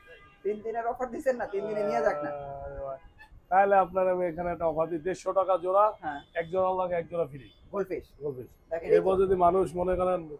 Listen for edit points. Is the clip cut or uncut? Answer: cut